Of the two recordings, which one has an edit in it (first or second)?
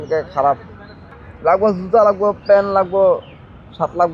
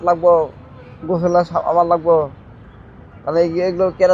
first